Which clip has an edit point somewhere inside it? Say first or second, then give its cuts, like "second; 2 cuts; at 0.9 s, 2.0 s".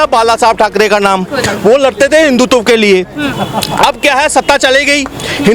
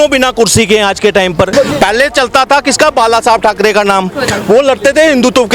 second; 1 cut; at 1.5 s